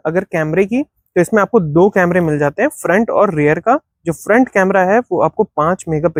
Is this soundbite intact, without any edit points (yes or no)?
yes